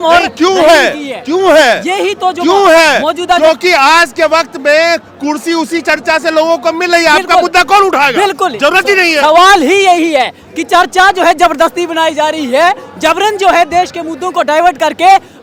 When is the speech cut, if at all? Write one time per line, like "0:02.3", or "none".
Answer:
none